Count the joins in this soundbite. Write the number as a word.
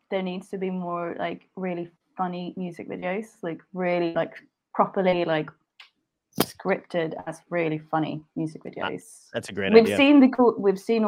zero